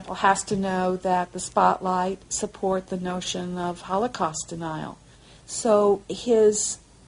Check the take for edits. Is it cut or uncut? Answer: cut